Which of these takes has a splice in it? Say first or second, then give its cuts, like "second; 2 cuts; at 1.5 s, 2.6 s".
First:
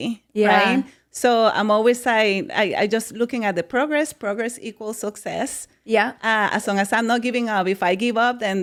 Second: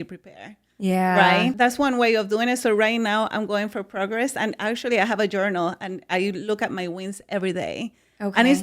second; 1 cut; at 1.5 s